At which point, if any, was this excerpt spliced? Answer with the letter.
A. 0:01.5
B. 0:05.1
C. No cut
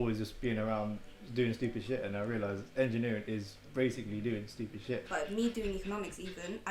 B